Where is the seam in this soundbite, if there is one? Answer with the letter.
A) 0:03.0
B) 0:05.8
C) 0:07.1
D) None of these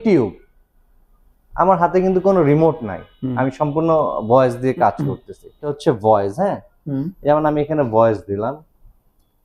B